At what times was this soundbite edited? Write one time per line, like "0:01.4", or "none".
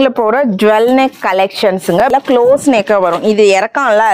0:02.0